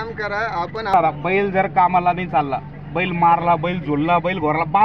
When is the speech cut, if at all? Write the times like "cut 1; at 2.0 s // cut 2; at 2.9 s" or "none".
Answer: cut 1; at 0.9 s